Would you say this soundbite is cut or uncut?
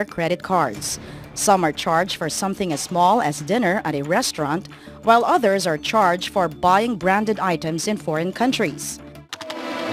uncut